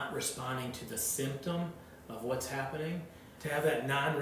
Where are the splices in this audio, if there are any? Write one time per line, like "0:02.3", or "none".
0:03.3